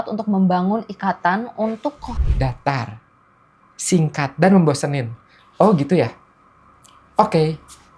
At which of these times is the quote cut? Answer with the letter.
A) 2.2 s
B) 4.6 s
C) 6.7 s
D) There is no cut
A